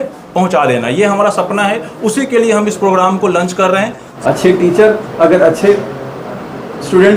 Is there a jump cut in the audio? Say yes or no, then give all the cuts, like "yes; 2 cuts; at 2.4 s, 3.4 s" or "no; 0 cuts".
yes; 1 cut; at 4.1 s